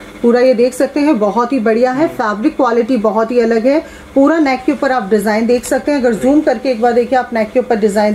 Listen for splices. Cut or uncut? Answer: uncut